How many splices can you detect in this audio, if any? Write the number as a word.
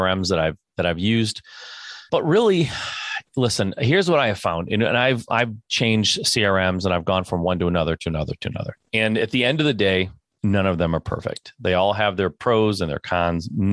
three